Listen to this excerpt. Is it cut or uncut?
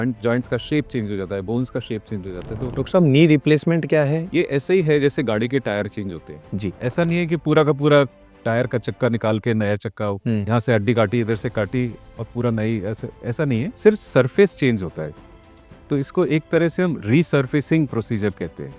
cut